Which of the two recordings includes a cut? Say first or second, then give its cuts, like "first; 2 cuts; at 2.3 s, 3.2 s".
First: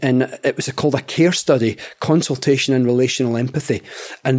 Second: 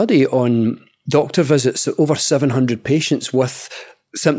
second; 1 cut; at 0.9 s